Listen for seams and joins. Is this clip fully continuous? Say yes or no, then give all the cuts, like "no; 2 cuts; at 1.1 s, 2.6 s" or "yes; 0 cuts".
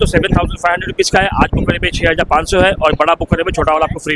yes; 0 cuts